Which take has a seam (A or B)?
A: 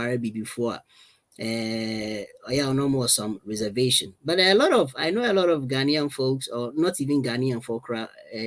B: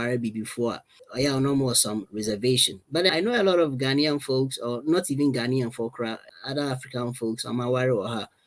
B